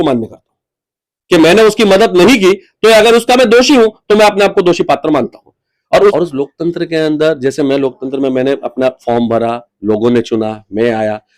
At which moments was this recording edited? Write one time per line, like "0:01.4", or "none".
0:06.1